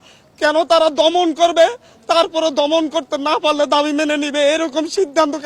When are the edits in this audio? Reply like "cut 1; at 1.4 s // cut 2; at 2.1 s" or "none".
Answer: none